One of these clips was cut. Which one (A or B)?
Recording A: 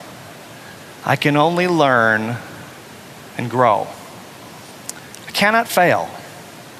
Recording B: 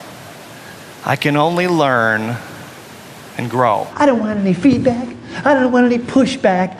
B